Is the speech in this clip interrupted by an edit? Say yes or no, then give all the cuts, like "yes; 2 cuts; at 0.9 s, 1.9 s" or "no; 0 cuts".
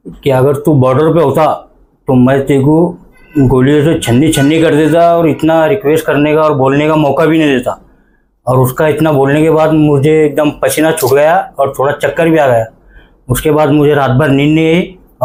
no; 0 cuts